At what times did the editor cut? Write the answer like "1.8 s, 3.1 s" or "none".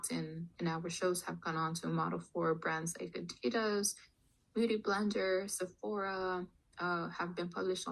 none